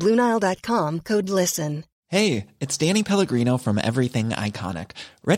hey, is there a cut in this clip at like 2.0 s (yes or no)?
yes